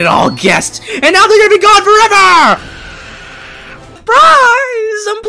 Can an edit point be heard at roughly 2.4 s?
no; 1 cut; at 3.9 s

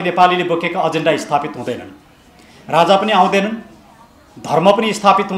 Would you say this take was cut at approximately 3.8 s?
no; 0 cuts

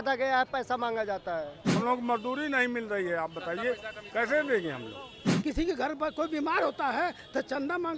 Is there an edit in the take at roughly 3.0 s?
no; 2 cuts; at 1.8 s, 5.3 s

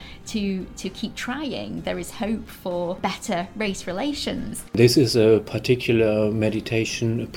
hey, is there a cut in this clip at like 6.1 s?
no; 2 cuts; at 3.0 s, 4.5 s

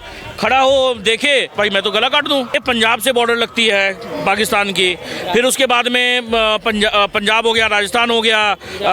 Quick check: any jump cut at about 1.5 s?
yes; 2 cuts; at 1.5 s, 2.5 s

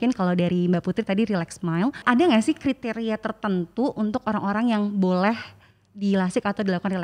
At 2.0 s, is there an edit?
yes; 1 cut; at 2.0 s

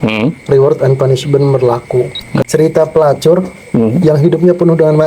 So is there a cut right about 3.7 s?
no; 1 cut; at 2.5 s

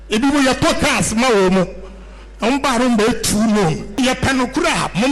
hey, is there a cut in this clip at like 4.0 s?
yes; 1 cut; at 4.0 s

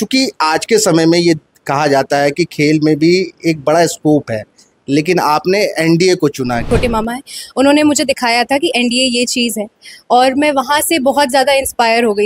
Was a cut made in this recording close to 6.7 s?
yes; 1 cut; at 6.7 s

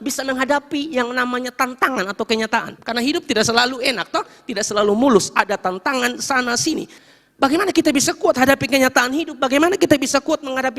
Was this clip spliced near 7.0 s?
yes; 2 cuts; at 2.8 s, 7.0 s

